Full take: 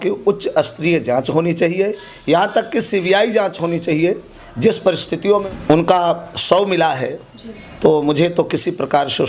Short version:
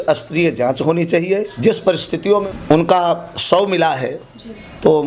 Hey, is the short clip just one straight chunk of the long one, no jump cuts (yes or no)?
no